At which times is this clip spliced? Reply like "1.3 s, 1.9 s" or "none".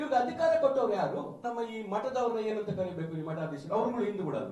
1.4 s